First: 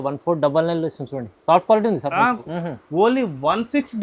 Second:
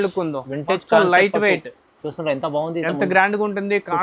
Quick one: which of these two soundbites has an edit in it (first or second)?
first